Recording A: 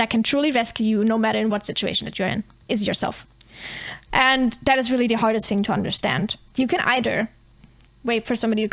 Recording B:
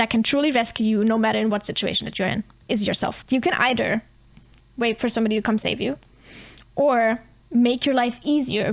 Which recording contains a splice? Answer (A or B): B